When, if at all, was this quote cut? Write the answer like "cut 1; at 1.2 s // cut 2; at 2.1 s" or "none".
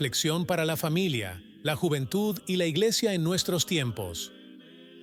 none